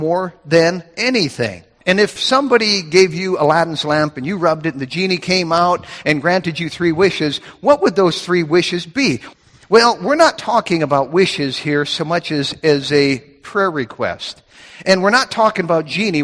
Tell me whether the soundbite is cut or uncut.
cut